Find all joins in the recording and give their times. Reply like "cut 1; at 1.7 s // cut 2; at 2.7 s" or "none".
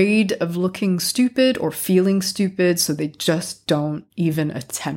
cut 1; at 4.0 s